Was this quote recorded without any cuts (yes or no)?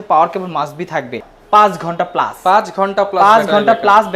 no